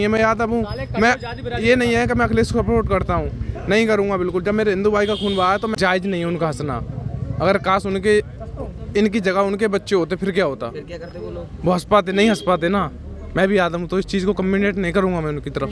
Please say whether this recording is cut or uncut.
cut